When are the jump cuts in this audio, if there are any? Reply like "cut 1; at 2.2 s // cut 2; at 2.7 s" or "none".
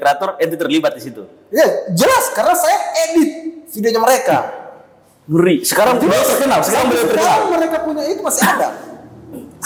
none